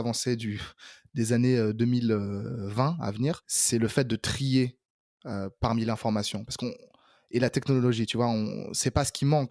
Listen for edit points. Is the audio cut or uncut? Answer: cut